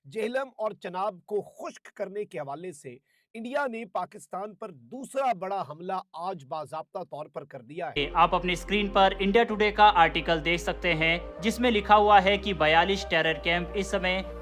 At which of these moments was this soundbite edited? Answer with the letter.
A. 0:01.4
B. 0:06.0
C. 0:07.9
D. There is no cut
C